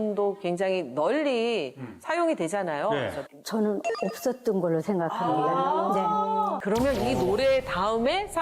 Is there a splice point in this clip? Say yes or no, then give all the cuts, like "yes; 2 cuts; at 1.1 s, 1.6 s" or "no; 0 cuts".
yes; 2 cuts; at 3.2 s, 6.6 s